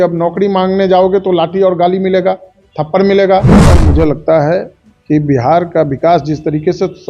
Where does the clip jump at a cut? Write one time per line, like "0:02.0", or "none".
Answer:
0:03.7